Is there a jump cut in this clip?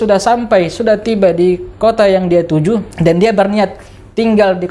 yes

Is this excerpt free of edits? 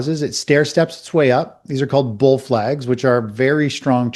yes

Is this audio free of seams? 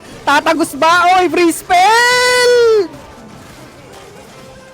yes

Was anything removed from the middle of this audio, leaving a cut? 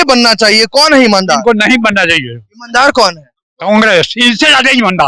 no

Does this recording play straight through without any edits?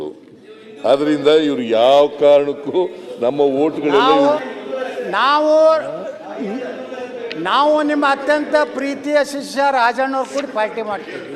no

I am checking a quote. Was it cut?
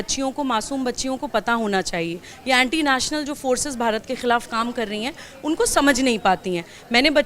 yes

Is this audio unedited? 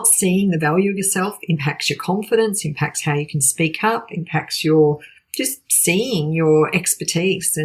yes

